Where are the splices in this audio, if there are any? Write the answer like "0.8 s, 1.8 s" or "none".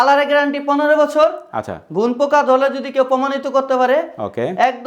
none